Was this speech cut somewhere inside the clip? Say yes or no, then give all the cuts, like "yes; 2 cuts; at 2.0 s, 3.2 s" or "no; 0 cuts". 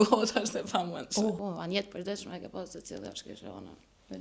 yes; 1 cut; at 1.4 s